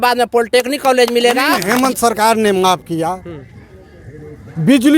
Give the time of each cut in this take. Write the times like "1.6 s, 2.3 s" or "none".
1.6 s

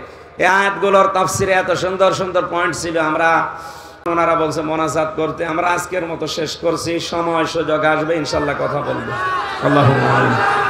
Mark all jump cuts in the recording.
4.0 s

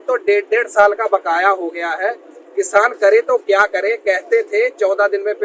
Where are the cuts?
none

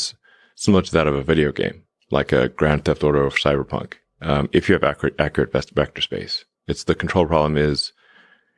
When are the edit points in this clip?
none

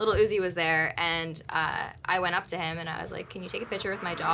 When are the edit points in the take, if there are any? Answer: none

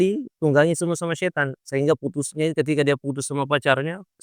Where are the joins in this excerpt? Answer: none

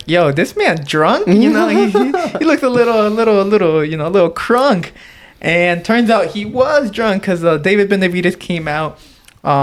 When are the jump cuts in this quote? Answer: none

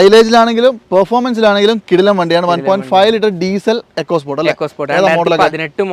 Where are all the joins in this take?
none

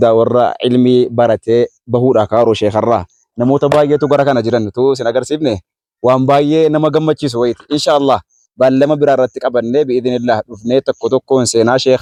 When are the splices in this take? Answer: none

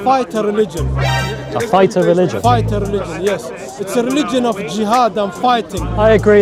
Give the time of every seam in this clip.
none

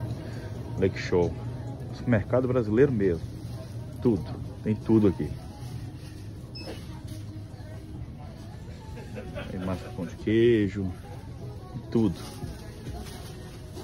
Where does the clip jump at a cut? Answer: 8.8 s

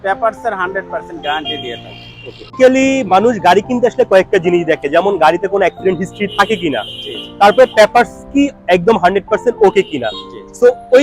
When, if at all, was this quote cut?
2.5 s

